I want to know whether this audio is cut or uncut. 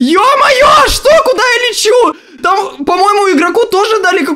uncut